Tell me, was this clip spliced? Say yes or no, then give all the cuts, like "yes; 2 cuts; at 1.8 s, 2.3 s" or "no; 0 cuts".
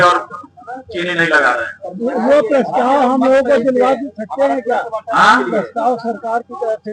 no; 0 cuts